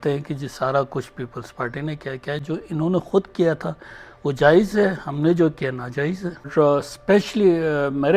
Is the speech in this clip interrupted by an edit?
yes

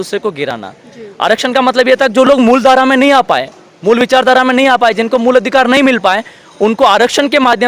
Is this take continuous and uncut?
yes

